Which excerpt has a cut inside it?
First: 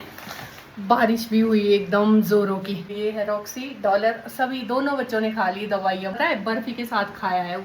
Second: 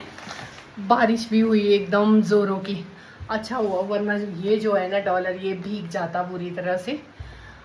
first; 2 cuts; at 2.9 s, 6.2 s

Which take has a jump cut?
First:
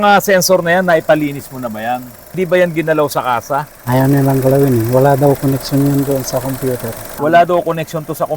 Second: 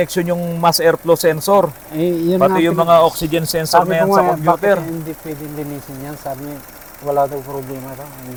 first; 2 cuts; at 2.2 s, 7.1 s

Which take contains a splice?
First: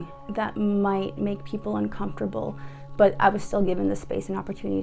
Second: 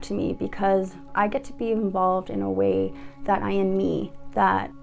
second; 1 cut; at 1.1 s

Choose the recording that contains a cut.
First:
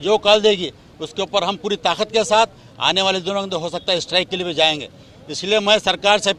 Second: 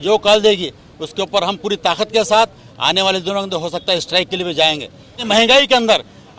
second; 1 cut; at 5.2 s

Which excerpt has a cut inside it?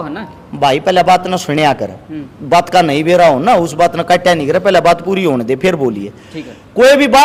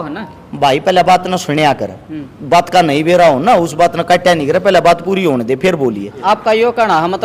second; 1 cut; at 6.2 s

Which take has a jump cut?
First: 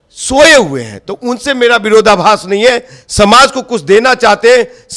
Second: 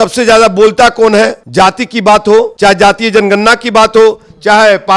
second; 2 cuts; at 1.4 s, 2.5 s

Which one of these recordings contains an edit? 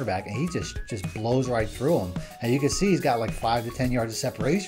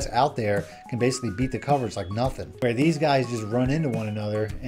second; 1 cut; at 2.5 s

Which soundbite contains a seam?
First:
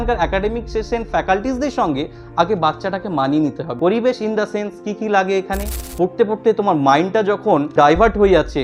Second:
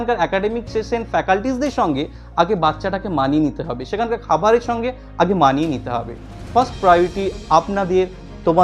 first; 3 cuts; at 3.7 s, 5.8 s, 7.7 s

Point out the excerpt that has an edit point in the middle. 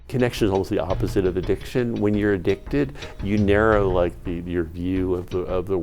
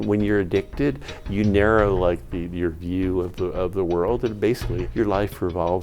second; 1 cut; at 4.8 s

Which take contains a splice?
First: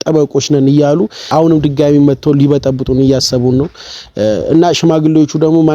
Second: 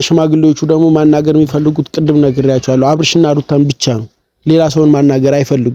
first; 1 cut; at 1.2 s

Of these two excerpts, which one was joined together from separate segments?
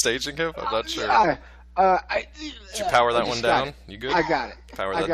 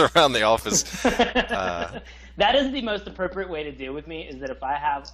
second; 1 cut; at 3.5 s

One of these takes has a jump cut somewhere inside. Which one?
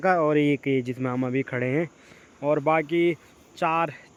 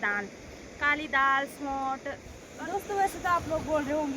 second; 1 cut; at 2.5 s

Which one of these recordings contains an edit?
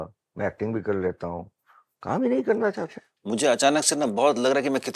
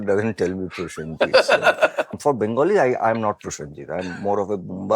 second; 1 cut; at 2.1 s

